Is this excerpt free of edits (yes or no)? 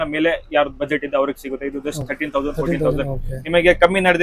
yes